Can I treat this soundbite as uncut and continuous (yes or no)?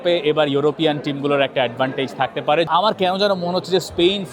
no